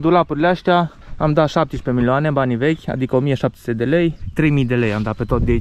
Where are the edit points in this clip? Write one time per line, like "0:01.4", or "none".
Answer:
0:04.2